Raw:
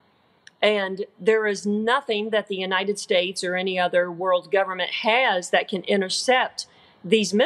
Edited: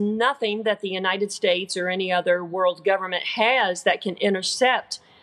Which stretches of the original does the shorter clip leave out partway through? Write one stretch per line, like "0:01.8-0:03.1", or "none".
none